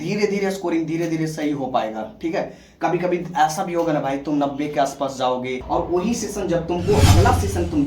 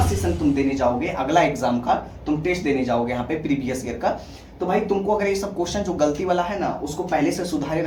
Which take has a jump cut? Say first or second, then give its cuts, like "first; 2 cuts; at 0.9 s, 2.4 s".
first; 1 cut; at 5.6 s